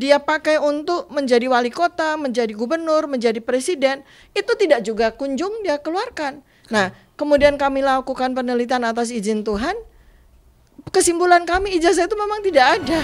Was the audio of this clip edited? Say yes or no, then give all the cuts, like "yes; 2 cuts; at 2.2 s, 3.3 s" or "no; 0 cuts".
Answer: no; 0 cuts